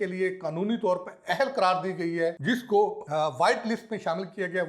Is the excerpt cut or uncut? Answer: cut